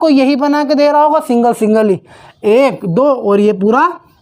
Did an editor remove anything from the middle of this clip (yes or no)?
no